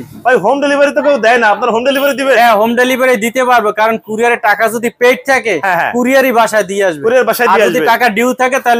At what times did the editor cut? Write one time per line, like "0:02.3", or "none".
none